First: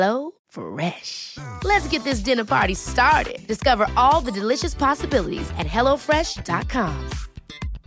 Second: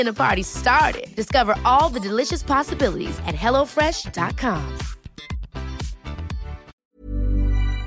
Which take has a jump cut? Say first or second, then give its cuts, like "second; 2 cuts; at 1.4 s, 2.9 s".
second; 1 cut; at 6.8 s